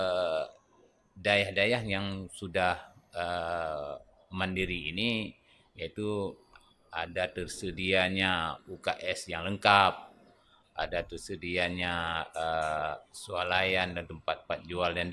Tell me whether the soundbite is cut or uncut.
uncut